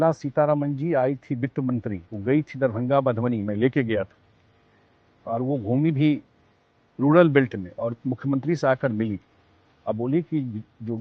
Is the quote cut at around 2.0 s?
yes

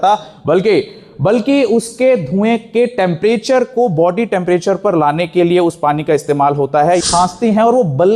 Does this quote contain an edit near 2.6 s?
no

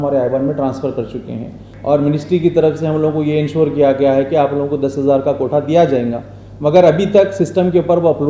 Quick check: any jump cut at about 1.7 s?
yes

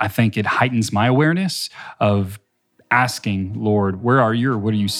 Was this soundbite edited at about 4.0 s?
yes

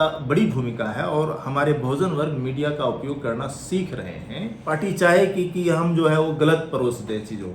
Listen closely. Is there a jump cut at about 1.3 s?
no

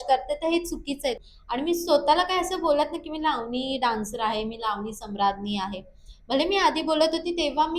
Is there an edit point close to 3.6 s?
no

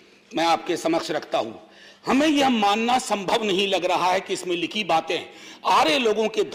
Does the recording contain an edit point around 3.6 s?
no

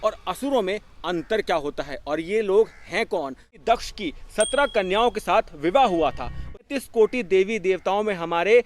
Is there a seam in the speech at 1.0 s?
no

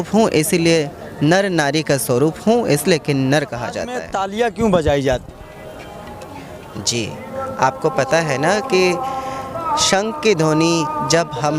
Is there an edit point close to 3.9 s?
yes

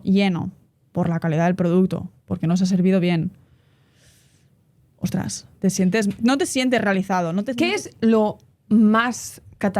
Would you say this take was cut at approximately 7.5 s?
yes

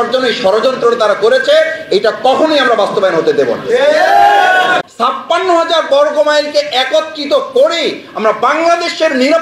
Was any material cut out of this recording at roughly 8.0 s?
no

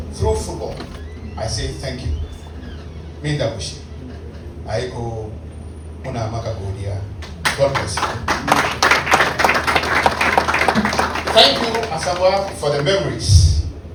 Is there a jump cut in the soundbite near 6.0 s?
no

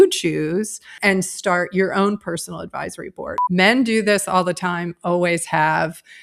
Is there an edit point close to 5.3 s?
no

